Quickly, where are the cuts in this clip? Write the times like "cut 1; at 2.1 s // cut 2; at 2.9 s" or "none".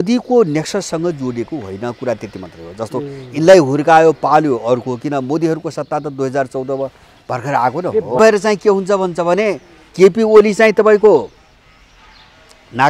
cut 1; at 8.2 s